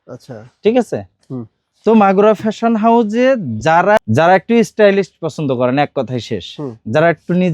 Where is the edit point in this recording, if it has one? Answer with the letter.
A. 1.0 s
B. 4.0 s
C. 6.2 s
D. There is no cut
B